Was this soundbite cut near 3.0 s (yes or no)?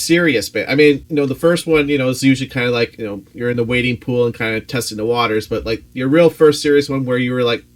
yes